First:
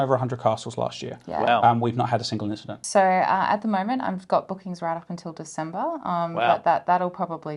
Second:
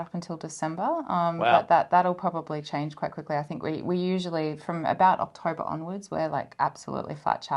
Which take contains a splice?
first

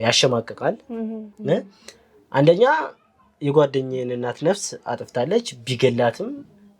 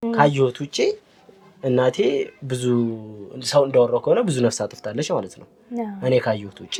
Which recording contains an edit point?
first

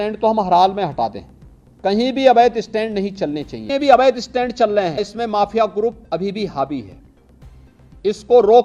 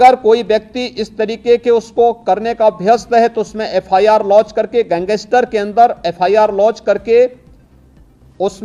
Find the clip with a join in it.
first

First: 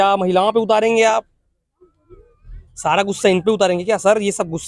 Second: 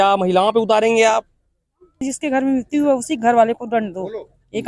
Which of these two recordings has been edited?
second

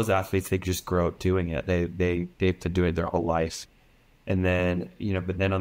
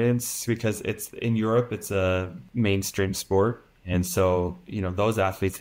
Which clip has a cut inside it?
second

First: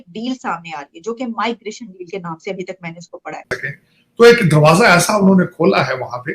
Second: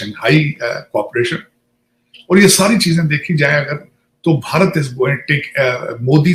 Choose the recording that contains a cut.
first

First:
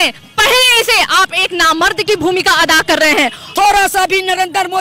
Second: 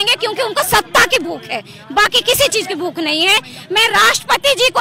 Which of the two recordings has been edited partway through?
first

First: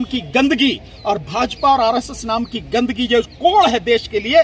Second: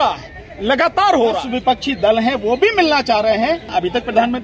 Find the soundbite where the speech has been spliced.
second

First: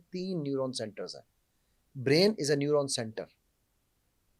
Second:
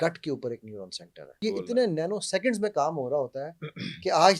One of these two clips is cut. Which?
second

